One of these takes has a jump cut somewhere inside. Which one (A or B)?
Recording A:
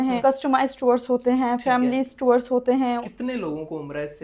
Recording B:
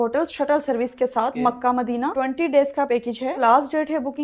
A